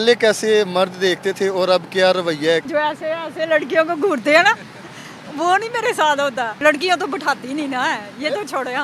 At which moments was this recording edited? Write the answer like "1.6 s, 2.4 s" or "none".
2.7 s, 6.6 s